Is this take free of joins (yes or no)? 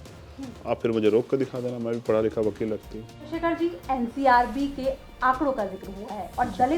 no